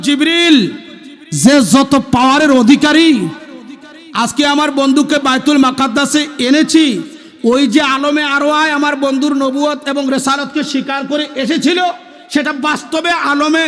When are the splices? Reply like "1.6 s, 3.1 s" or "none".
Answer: none